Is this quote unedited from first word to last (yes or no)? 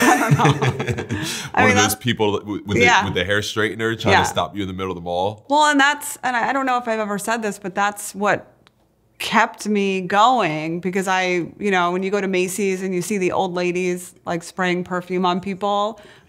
yes